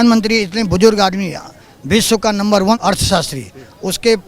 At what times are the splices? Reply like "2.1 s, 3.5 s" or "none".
2.8 s